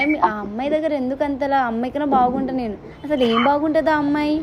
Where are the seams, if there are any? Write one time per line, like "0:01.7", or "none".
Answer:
none